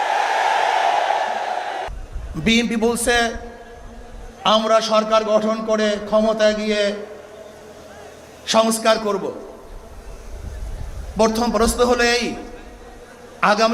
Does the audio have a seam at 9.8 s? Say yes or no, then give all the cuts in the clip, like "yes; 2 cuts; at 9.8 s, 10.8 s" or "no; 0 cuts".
no; 1 cut; at 1.9 s